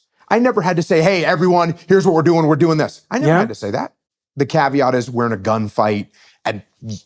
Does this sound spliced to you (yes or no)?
yes